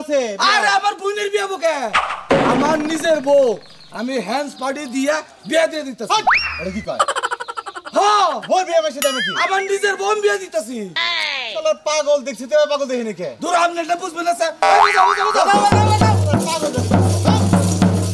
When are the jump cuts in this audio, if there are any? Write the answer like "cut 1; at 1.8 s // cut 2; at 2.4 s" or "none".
none